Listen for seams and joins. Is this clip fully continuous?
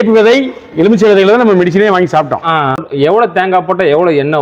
no; 1 cut; at 2.9 s

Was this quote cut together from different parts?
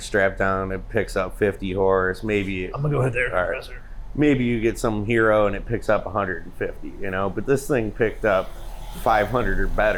no; 0 cuts

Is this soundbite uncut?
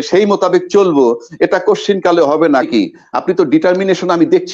no; 1 cut; at 2.7 s

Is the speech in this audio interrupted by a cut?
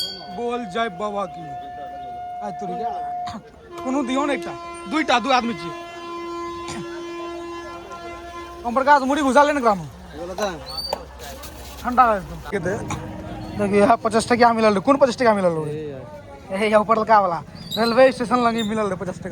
yes; 1 cut; at 12.3 s

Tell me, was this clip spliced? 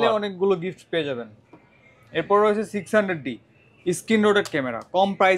no; 0 cuts

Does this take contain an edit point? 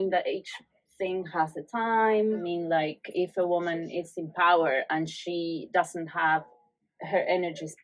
yes; 1 cut; at 2.4 s

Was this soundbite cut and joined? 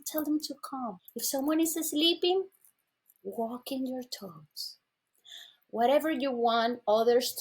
yes; 1 cut; at 1.1 s

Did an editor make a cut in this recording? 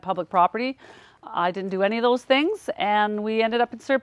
no; 0 cuts

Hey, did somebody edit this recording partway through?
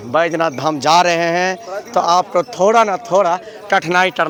no; 0 cuts

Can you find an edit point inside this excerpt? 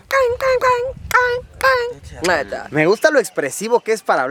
no; 0 cuts

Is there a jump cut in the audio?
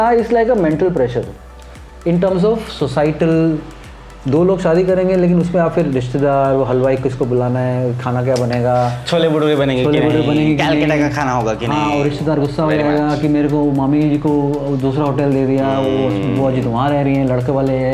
no; 0 cuts

